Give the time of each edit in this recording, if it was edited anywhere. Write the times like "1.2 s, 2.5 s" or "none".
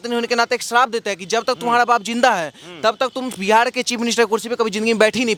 none